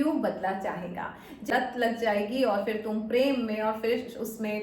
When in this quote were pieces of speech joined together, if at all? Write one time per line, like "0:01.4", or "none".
0:01.5